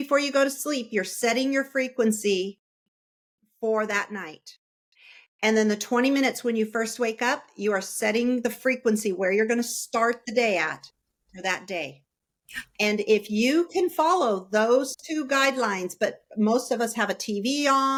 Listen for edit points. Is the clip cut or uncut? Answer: uncut